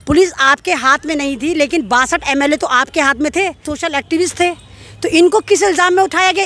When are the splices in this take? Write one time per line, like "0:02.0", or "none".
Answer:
0:03.7